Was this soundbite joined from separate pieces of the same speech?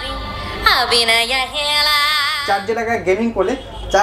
yes; 1 cut; at 2.3 s

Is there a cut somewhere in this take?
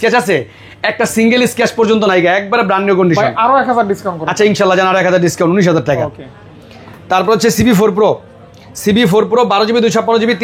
no; 0 cuts

